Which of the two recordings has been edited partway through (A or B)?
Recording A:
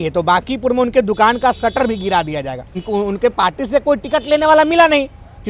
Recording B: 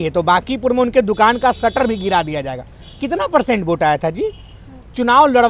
A